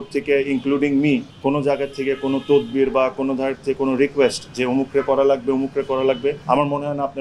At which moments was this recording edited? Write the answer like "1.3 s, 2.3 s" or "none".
1.3 s, 6.4 s